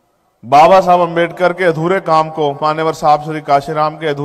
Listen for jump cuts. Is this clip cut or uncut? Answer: uncut